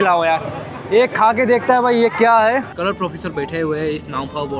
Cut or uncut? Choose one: cut